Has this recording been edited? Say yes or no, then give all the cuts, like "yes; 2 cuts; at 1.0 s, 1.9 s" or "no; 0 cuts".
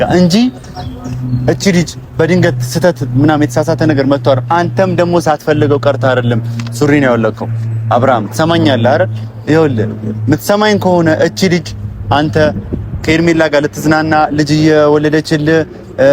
no; 0 cuts